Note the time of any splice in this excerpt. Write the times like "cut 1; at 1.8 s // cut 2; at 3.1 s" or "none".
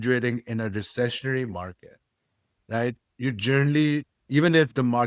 none

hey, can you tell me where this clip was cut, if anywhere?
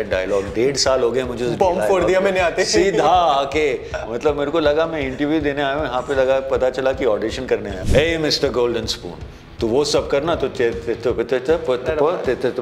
cut 1; at 7.8 s

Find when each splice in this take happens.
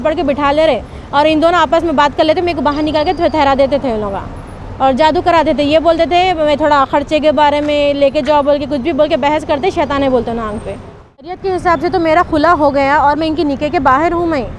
cut 1; at 11.4 s

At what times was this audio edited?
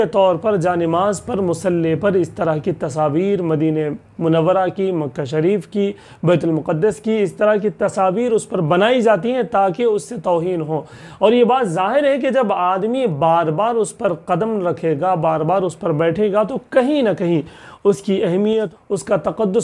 cut 1; at 18.7 s

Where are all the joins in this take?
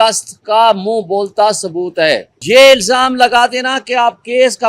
cut 1; at 2.3 s

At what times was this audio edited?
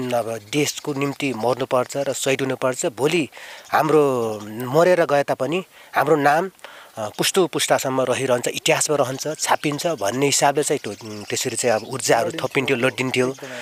none

